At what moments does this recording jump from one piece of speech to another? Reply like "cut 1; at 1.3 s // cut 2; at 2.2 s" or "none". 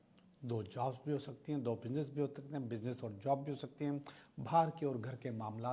none